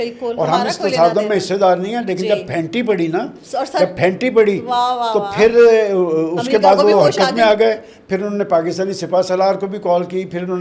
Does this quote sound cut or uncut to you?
uncut